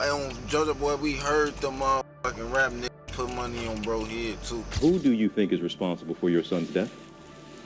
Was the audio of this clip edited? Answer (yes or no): yes